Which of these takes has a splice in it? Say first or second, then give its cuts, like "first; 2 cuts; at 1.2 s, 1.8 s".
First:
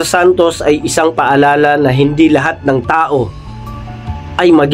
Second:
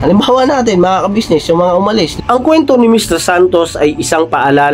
second; 1 cut; at 2.1 s